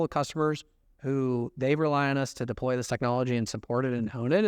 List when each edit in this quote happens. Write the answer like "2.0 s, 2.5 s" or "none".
none